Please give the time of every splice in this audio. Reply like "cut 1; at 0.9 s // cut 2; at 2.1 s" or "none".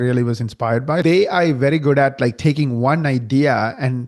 cut 1; at 1.0 s